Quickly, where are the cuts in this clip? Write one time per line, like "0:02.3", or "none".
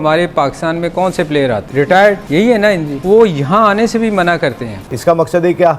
0:04.8